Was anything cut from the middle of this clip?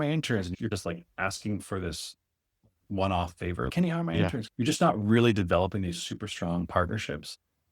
yes; 1 cut; at 4.5 s

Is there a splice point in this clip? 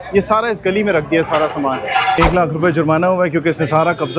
yes; 1 cut; at 2.2 s

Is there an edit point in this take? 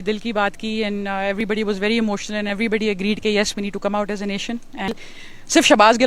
yes; 1 cut; at 4.9 s

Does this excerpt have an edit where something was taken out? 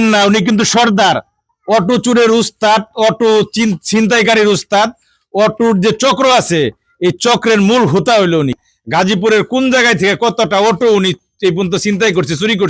yes; 1 cut; at 8.6 s

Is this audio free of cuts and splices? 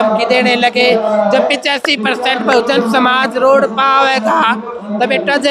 yes; 0 cuts

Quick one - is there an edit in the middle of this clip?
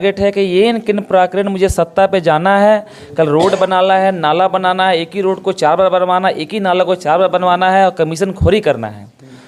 no; 0 cuts

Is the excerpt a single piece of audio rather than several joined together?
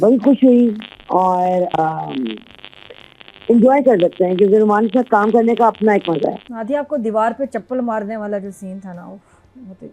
no; 2 cuts; at 1.7 s, 6.5 s

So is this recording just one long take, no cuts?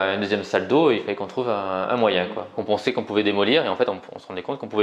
no; 1 cut; at 2.6 s

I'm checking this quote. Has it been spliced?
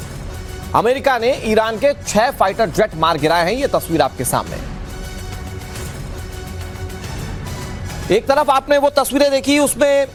no; 0 cuts

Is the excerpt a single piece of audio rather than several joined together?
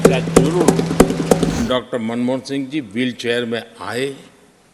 no; 1 cut; at 1.6 s

